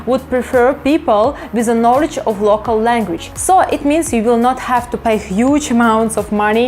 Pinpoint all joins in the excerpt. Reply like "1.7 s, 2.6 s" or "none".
3.3 s